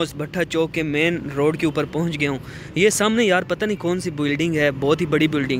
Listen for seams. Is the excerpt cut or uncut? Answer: uncut